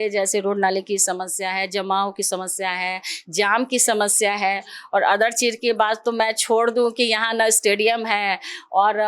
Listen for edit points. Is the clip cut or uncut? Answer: uncut